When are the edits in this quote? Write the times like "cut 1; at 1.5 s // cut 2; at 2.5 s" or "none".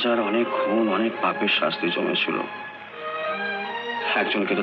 none